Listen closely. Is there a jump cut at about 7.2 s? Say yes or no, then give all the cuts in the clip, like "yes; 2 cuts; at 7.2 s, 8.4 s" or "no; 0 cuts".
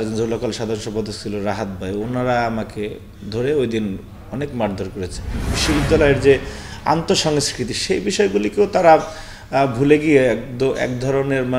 no; 1 cut; at 5.5 s